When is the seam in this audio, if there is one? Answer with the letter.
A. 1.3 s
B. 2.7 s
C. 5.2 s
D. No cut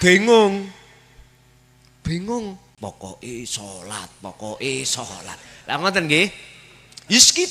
B